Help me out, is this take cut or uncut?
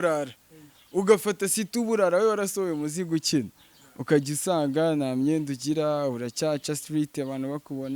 uncut